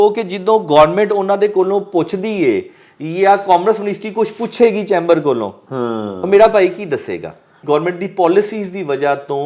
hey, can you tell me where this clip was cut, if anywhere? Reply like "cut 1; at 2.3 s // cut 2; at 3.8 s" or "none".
cut 1; at 7.5 s

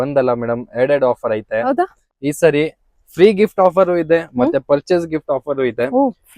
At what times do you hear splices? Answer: cut 1; at 2.0 s

